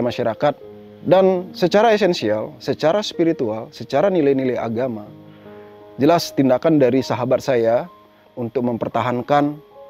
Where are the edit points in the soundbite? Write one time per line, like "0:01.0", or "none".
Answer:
none